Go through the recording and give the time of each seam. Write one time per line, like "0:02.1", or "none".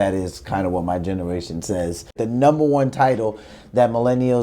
0:02.2

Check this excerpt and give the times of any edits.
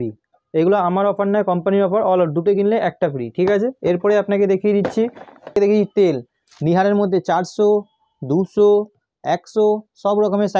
none

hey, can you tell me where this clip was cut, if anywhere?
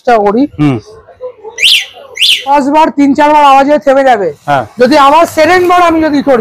0:02.4

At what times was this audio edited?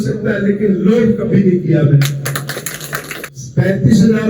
0:03.2

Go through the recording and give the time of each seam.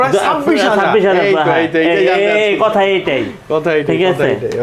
none

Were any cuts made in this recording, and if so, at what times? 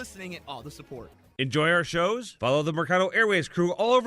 0:01.2

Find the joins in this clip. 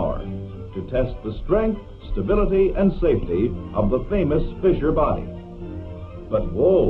0:02.8

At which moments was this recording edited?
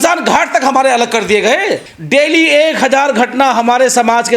0:01.9

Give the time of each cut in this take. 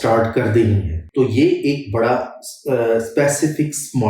0:00.9

